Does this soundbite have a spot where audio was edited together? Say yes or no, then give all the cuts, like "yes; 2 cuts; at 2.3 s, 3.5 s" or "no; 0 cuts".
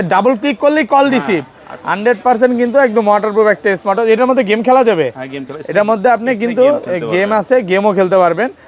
no; 0 cuts